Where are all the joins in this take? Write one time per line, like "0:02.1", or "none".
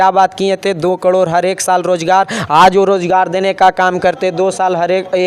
none